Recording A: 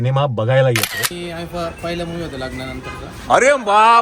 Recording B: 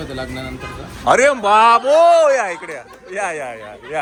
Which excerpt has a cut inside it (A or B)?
A